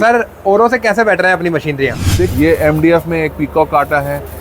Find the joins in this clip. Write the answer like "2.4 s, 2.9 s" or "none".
2.3 s